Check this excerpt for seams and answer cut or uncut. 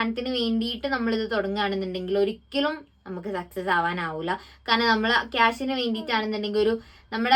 uncut